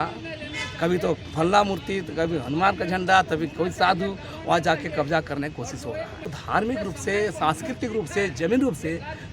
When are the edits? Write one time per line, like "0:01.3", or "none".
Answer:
0:06.4